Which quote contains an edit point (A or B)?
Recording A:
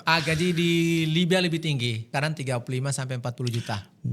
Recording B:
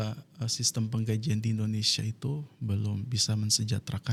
A